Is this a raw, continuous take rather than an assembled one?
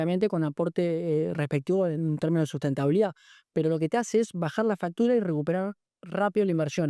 yes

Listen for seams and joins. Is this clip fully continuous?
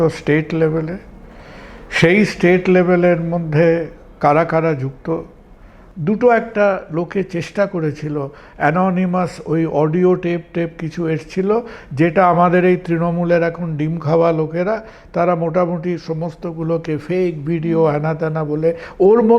no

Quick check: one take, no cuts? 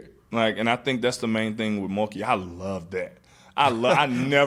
yes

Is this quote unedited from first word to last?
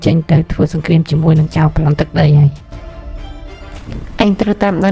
yes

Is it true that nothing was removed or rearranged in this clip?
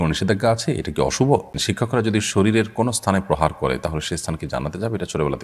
no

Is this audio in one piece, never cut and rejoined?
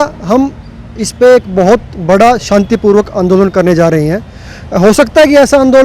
yes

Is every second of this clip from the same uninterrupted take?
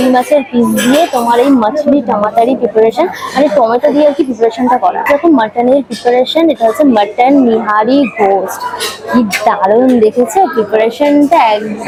yes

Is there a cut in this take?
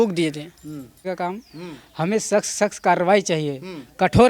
yes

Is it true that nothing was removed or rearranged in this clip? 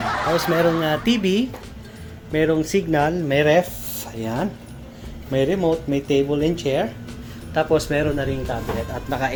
yes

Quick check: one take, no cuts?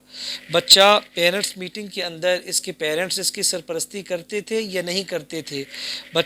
yes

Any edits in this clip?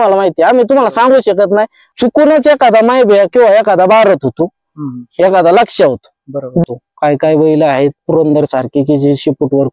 yes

